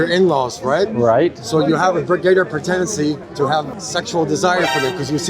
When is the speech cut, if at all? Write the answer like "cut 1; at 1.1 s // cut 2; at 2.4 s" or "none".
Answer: cut 1; at 3.4 s